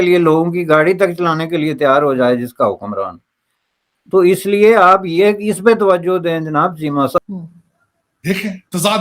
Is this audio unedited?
no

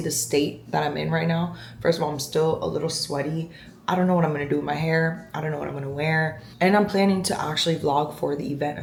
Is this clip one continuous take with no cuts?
yes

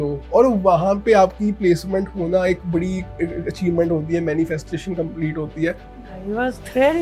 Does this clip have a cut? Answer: no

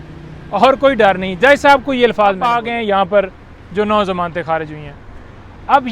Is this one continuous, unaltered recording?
no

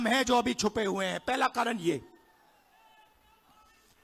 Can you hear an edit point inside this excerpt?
no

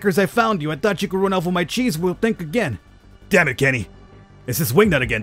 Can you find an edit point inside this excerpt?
no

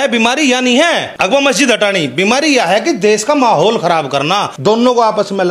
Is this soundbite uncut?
no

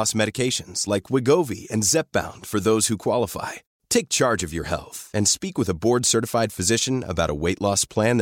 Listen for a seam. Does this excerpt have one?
no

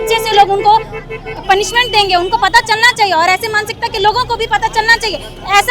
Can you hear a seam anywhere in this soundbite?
no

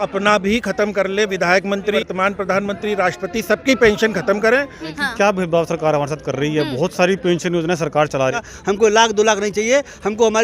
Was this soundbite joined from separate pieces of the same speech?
yes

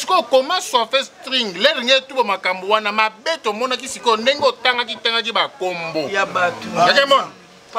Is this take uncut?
yes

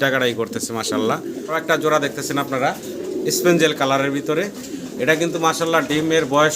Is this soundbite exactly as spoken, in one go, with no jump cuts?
no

